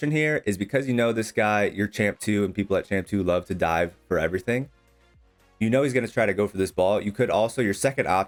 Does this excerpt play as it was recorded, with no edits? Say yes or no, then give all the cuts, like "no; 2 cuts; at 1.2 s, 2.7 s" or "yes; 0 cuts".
yes; 0 cuts